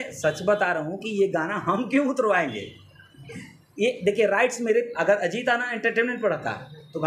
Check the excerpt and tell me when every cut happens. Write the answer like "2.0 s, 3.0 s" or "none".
none